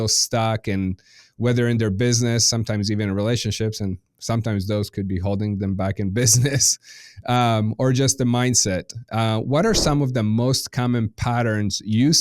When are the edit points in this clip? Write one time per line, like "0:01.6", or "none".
none